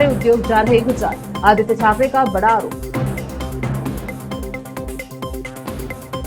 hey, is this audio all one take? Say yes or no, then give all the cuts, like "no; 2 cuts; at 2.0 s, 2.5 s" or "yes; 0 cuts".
yes; 0 cuts